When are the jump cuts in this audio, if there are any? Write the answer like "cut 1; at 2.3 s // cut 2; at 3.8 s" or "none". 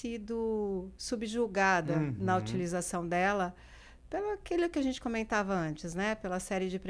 none